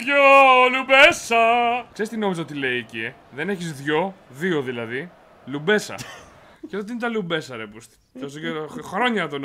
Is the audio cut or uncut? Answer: cut